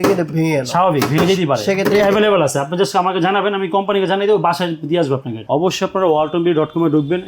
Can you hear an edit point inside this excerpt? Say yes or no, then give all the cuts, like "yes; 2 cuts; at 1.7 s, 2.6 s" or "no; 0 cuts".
yes; 1 cut; at 5.3 s